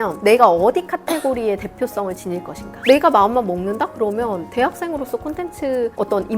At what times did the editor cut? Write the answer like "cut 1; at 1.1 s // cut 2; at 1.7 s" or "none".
cut 1; at 2.8 s